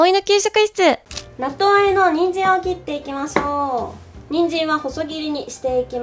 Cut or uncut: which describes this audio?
cut